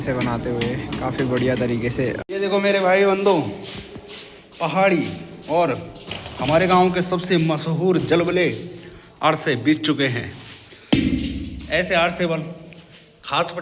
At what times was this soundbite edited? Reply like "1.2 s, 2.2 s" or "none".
2.2 s